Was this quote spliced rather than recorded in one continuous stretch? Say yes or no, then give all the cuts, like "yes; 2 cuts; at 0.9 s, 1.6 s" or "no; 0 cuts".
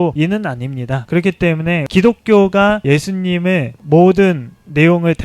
yes; 1 cut; at 1.9 s